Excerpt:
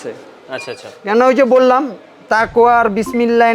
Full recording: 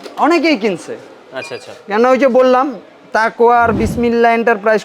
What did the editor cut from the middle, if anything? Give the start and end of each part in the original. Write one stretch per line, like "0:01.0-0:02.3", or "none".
none